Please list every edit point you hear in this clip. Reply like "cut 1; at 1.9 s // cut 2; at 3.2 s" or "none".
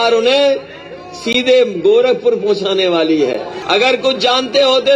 cut 1; at 3.5 s

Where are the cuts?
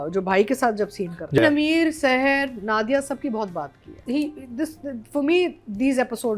cut 1; at 1.4 s // cut 2; at 4.0 s

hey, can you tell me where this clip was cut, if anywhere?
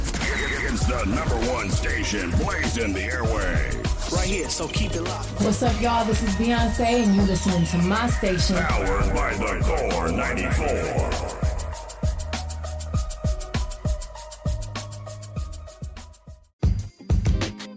cut 1; at 16.5 s

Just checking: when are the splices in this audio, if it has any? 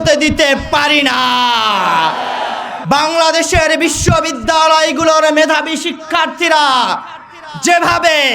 cut 1; at 2.7 s

